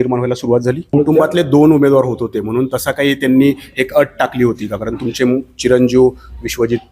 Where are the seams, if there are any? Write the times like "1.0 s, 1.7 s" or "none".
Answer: 0.9 s

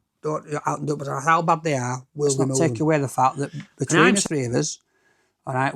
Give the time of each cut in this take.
2.6 s

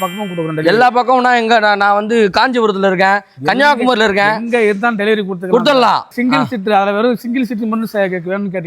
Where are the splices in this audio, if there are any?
6.1 s

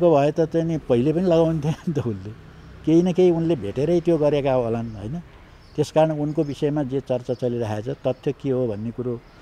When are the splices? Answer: none

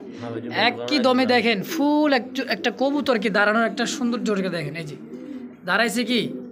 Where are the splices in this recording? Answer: none

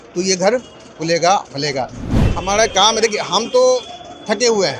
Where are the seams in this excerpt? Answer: 2.3 s

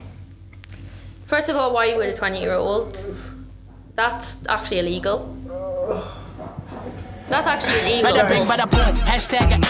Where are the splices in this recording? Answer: 8.4 s

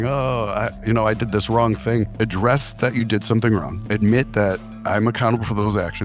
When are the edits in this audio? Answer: 2.1 s, 3.8 s

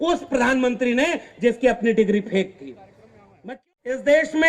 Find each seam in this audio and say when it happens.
3.4 s

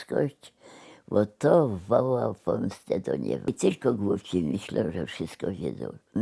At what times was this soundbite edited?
3.5 s

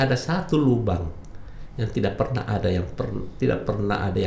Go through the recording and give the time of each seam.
none

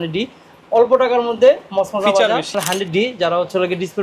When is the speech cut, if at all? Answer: 2.6 s

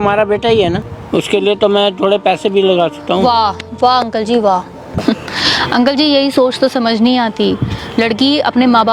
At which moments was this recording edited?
0.9 s, 4.9 s

